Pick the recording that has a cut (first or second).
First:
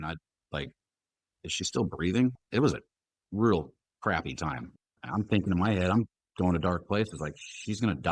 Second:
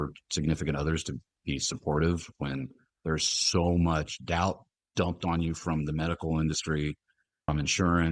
first